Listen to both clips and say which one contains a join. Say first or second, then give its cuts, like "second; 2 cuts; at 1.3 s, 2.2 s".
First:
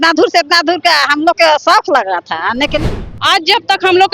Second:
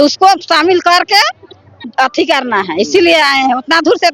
first; 1 cut; at 3.0 s